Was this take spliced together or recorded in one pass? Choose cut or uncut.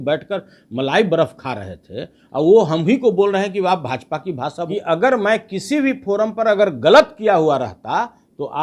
cut